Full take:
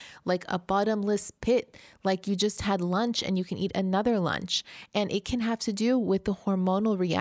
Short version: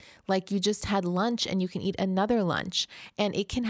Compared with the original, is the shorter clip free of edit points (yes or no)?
yes